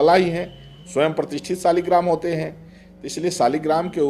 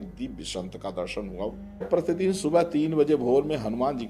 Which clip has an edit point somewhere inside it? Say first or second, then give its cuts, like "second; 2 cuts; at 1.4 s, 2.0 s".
second; 1 cut; at 1.9 s